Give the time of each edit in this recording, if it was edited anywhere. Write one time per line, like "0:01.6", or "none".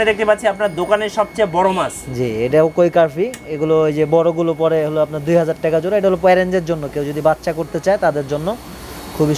none